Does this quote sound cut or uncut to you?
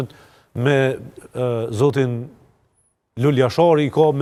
uncut